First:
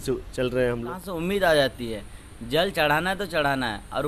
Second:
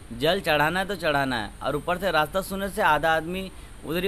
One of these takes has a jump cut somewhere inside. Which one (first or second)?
first